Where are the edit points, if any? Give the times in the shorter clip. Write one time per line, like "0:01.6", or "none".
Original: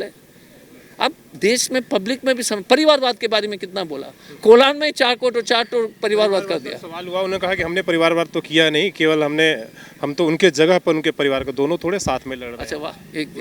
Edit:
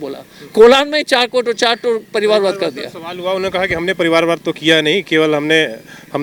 none